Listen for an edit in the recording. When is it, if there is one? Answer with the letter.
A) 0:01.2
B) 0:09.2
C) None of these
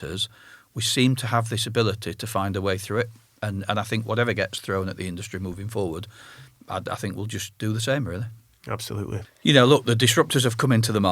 B